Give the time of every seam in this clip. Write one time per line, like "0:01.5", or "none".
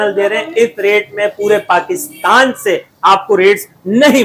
none